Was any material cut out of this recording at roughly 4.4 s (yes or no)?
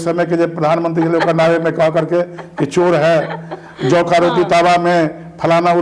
no